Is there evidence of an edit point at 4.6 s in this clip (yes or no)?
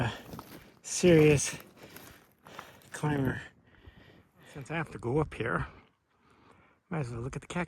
yes